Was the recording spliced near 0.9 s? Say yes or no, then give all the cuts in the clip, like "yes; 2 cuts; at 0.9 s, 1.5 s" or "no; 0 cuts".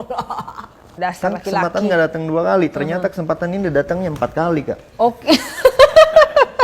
yes; 1 cut; at 0.9 s